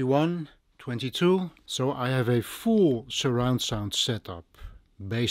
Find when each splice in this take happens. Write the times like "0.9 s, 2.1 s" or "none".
1.6 s